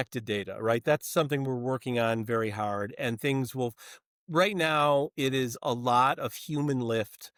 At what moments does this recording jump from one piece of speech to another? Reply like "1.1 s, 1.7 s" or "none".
none